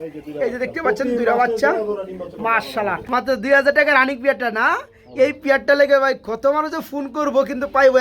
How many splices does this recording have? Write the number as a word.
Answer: one